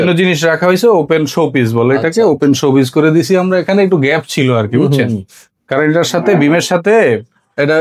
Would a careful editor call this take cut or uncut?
uncut